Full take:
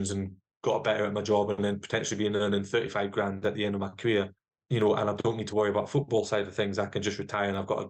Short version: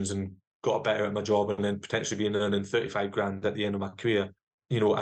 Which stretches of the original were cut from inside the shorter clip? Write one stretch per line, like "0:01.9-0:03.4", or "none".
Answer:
none